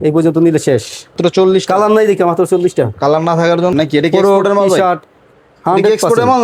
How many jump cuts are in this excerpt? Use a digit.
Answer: 2